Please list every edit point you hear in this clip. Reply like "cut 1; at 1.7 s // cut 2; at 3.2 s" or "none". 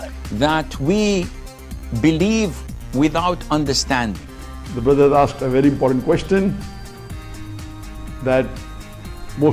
none